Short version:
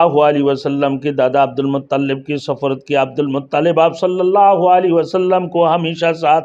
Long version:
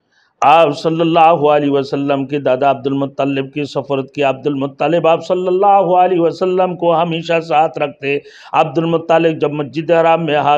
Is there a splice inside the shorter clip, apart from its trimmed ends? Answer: no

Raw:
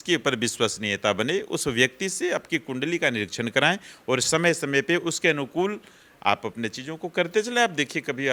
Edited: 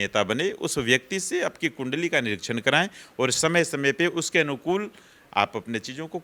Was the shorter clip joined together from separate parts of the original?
no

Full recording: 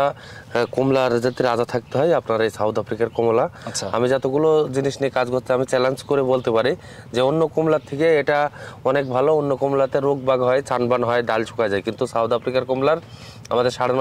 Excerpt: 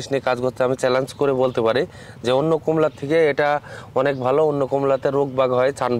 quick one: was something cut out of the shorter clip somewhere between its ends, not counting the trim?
no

